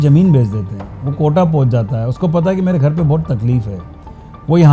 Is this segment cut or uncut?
uncut